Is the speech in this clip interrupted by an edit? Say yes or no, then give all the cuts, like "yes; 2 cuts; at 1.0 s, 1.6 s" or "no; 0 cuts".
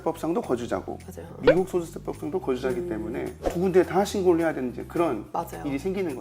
no; 0 cuts